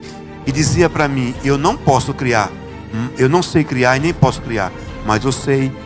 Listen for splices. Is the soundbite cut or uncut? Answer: uncut